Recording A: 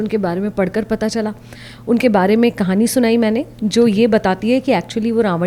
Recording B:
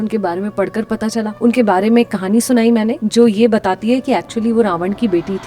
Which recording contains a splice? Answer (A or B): B